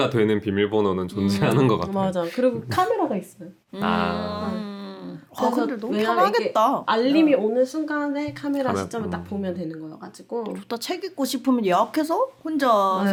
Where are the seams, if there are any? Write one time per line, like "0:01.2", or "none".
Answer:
none